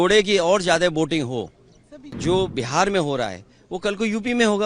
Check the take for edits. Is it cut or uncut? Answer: cut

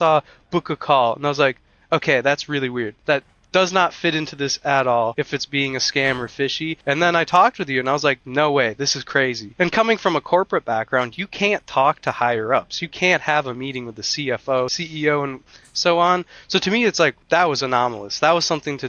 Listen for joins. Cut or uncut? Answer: cut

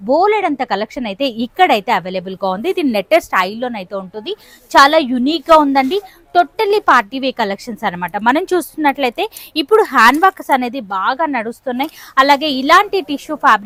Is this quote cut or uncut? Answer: uncut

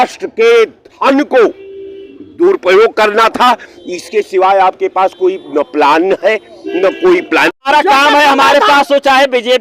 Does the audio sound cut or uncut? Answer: cut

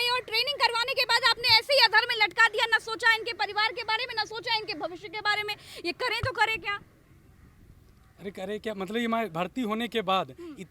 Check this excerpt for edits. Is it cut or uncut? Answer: uncut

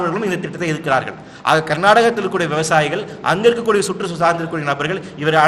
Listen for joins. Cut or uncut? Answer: uncut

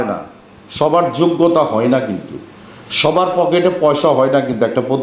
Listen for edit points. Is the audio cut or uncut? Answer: uncut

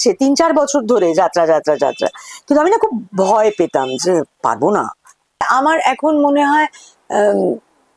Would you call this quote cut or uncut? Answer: cut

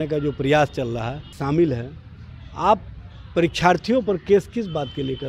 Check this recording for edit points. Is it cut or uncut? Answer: cut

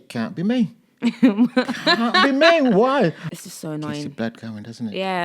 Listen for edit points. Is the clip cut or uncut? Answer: cut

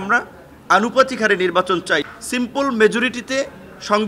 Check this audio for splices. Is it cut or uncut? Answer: cut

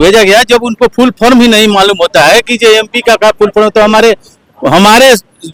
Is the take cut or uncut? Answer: uncut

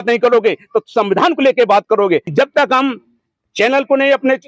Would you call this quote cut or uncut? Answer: cut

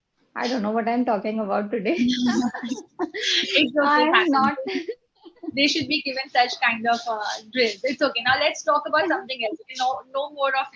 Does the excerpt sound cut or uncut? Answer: uncut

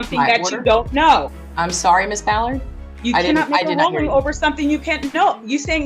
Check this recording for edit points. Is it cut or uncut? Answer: uncut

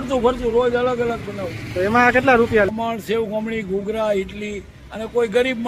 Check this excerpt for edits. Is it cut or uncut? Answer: cut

